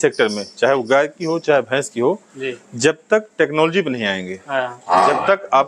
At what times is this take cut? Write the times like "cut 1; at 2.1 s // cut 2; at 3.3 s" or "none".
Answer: none